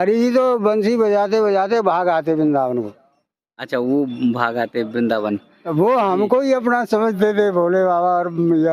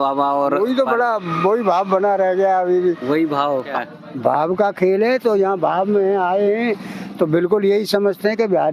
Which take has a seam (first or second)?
second